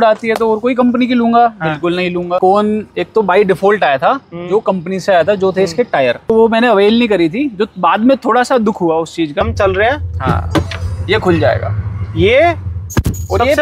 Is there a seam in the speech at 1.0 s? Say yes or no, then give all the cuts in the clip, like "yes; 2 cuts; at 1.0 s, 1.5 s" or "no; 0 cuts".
no; 3 cuts; at 2.4 s, 6.3 s, 9.4 s